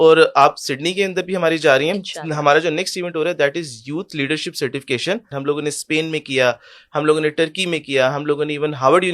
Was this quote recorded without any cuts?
no; 1 cut; at 5.3 s

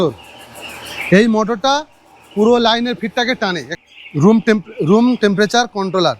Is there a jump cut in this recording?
yes; 1 cut; at 3.7 s

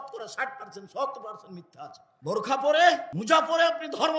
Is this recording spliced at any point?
yes; 2 cuts; at 2.0 s, 3.1 s

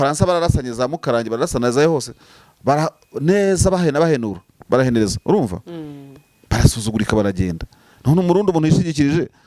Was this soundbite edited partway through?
no; 0 cuts

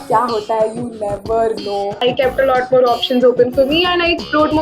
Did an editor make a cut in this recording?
yes; 1 cut; at 1.9 s

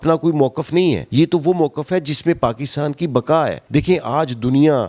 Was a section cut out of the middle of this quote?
yes; 2 cuts; at 1.0 s, 3.6 s

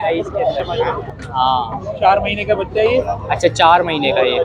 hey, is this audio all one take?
no; 1 cut; at 1.0 s

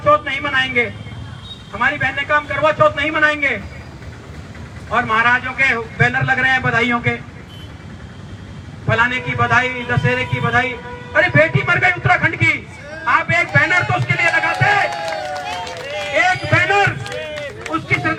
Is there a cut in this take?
no; 0 cuts

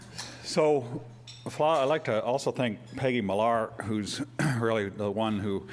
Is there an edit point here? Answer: no; 0 cuts

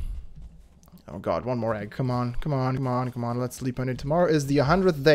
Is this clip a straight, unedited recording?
yes; 0 cuts

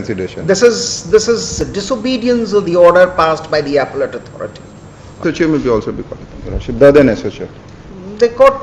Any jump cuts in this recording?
yes; 1 cut; at 5.2 s

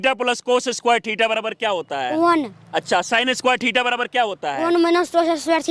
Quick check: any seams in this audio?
no; 0 cuts

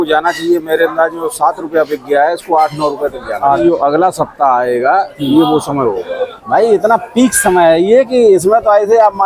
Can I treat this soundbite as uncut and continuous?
no; 2 cuts; at 3.6 s, 6.3 s

